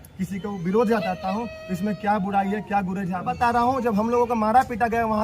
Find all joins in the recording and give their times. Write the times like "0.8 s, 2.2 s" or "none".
3.3 s